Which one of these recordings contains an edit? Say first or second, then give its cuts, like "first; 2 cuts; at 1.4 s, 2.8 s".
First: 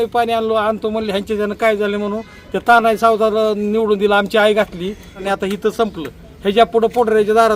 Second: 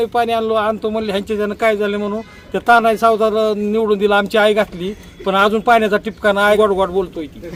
first; 1 cut; at 5.2 s